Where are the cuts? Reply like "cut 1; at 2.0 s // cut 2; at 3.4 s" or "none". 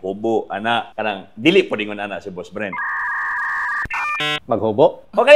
none